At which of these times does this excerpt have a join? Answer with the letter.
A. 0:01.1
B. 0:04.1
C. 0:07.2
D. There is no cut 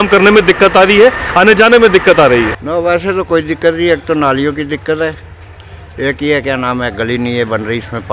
D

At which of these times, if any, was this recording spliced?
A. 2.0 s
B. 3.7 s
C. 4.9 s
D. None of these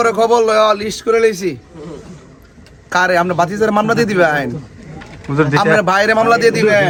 D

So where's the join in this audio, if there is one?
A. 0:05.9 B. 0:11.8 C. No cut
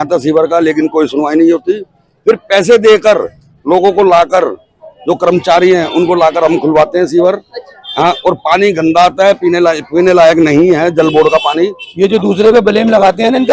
B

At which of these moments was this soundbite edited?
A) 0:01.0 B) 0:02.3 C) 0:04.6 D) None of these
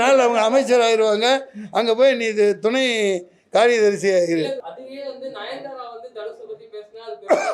C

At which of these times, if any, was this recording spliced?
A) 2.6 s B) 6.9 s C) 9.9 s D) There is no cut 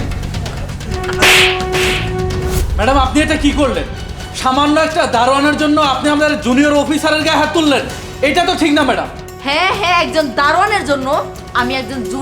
A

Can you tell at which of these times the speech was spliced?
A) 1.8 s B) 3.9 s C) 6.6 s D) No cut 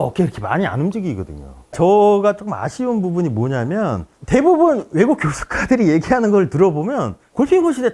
A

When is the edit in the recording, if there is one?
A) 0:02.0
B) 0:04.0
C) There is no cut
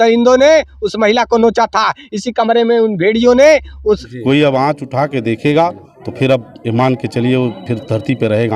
B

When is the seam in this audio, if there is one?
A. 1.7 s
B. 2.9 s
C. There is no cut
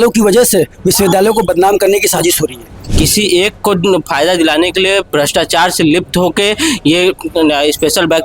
B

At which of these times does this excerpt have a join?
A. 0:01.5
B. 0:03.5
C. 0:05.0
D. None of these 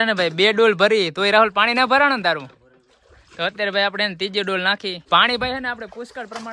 C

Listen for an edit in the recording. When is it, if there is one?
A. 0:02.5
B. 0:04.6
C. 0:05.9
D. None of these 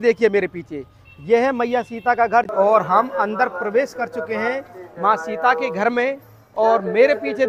A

